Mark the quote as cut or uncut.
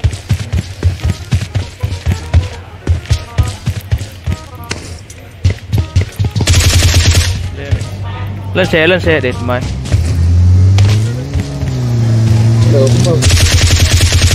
cut